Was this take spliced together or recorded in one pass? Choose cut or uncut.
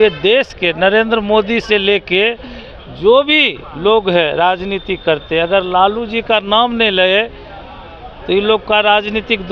uncut